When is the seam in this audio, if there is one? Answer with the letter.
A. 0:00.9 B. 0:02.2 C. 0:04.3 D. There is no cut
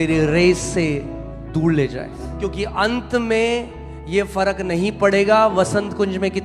B